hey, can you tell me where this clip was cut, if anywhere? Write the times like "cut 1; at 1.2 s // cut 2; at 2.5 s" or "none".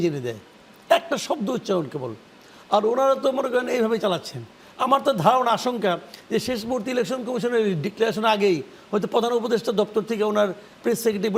none